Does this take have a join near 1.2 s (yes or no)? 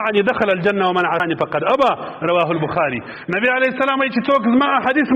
yes